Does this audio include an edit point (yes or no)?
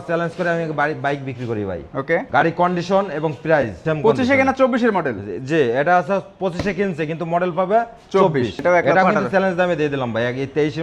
yes